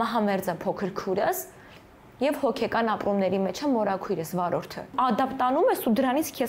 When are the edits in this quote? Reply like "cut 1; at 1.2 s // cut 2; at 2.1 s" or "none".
cut 1; at 4.9 s